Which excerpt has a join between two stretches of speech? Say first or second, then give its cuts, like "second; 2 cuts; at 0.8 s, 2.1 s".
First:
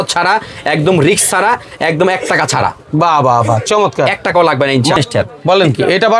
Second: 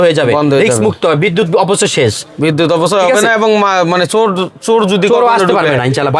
first; 1 cut; at 4.9 s